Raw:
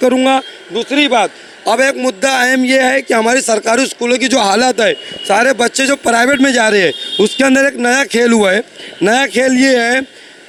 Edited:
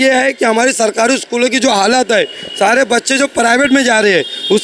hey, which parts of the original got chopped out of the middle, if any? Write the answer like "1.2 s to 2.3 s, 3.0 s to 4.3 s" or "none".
none